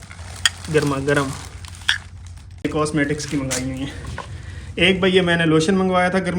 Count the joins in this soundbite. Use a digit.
1